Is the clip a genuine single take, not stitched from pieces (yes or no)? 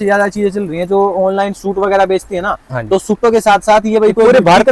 yes